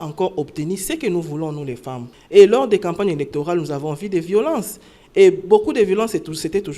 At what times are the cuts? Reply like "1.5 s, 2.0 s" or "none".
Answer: 2.0 s